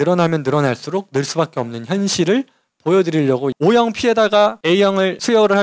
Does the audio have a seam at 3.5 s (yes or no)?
yes